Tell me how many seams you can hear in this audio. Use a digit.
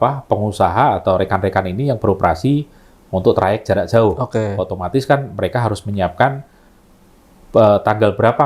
0